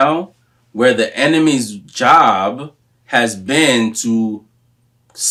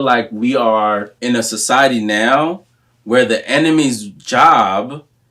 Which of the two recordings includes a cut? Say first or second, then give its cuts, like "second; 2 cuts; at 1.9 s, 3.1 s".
second; 1 cut; at 1.1 s